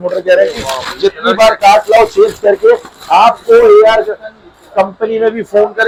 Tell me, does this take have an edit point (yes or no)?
no